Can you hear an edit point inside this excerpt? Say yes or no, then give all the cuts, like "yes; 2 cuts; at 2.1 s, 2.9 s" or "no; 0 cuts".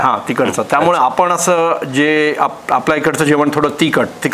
no; 0 cuts